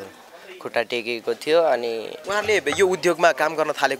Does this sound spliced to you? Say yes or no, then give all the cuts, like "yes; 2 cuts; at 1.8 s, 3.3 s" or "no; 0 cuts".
yes; 1 cut; at 2.1 s